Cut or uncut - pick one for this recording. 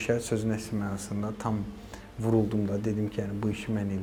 uncut